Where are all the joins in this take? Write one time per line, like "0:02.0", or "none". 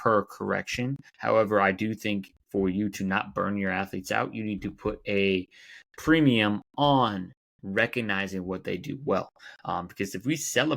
0:01.1
0:02.4

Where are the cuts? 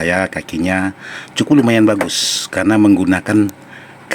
none

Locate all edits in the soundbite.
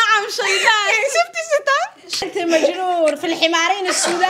0:02.2

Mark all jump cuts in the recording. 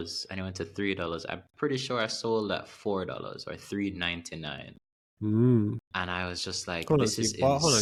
none

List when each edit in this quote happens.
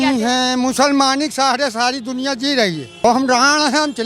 0:03.0

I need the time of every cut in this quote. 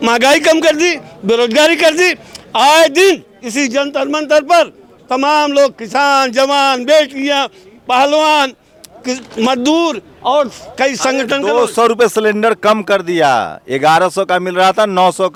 none

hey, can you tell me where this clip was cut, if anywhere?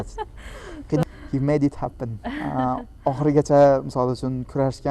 0:01.0

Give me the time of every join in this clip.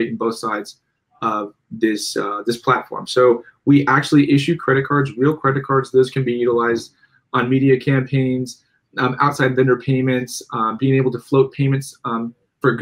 none

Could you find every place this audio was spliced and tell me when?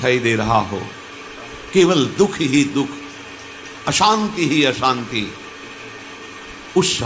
none

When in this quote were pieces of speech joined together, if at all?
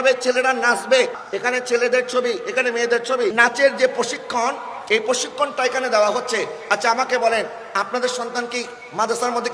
0:01.2
0:03.3

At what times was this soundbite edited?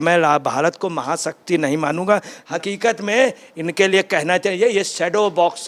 0:02.4

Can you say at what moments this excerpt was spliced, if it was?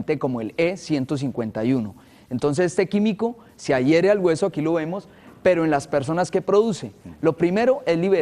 0:01.2

